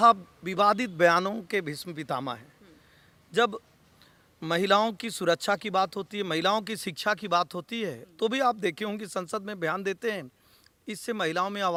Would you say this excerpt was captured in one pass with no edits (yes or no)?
yes